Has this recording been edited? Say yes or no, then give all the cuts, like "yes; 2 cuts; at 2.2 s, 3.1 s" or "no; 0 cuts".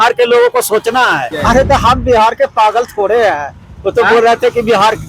yes; 1 cut; at 1.3 s